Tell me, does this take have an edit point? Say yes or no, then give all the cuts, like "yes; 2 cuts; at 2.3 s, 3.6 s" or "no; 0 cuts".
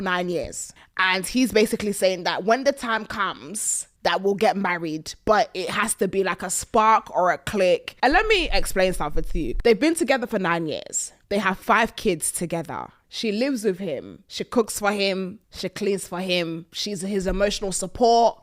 no; 0 cuts